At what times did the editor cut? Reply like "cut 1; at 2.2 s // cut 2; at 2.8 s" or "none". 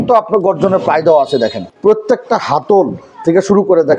cut 1; at 1.7 s